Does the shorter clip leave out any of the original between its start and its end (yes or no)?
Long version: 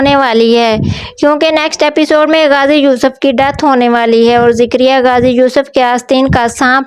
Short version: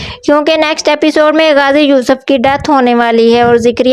no